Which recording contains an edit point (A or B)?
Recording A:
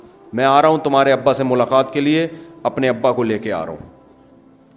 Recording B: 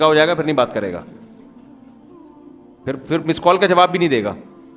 B